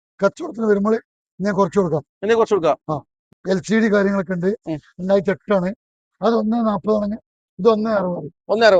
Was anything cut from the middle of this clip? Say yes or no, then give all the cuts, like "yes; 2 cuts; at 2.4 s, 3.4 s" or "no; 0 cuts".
yes; 1 cut; at 3.2 s